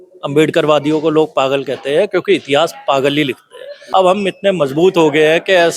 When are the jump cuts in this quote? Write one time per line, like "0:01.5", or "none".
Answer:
0:03.7